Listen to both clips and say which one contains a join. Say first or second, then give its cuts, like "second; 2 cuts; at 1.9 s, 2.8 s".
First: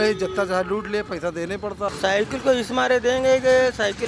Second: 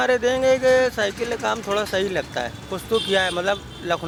first; 1 cut; at 1.9 s